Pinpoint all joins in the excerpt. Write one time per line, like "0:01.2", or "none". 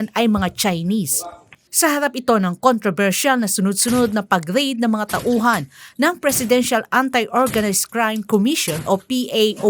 0:01.5